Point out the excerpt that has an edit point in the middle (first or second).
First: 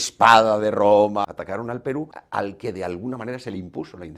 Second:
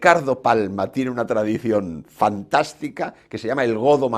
first